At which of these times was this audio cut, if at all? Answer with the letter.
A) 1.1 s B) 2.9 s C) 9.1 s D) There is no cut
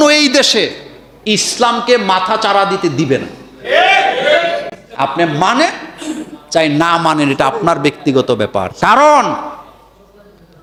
D